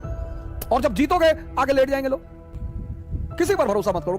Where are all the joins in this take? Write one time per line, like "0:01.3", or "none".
0:02.4